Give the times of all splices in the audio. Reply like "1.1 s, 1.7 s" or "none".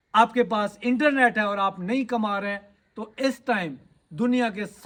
none